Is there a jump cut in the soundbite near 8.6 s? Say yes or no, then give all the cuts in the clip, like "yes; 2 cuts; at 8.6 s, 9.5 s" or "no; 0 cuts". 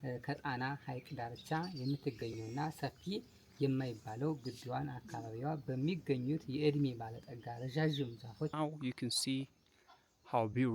yes; 1 cut; at 8.6 s